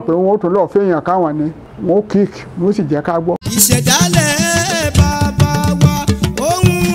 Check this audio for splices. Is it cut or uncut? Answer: cut